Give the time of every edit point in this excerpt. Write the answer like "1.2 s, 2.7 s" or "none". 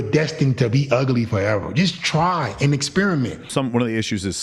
3.5 s